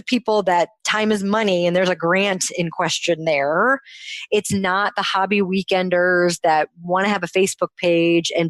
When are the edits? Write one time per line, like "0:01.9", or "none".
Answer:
none